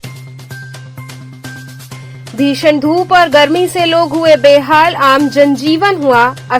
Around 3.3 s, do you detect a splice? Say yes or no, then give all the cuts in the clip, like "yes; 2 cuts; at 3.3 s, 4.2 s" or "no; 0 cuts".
no; 1 cut; at 1.8 s